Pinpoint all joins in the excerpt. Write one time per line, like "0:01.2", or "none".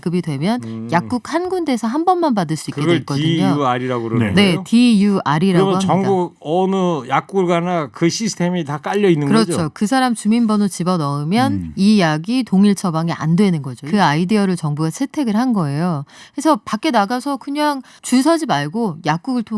0:13.7
0:17.9